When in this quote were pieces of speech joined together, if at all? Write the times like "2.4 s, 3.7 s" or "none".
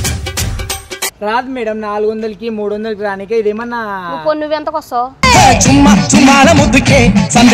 1.1 s